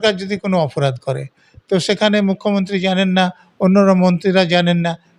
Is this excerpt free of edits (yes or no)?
yes